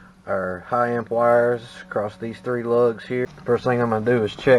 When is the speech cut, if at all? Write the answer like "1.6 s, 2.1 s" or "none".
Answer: 3.3 s

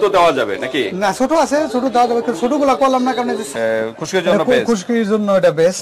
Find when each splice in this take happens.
3.4 s

